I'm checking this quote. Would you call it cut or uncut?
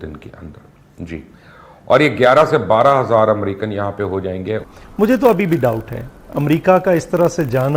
cut